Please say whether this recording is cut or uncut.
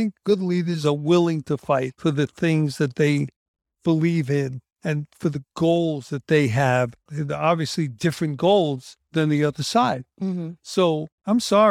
uncut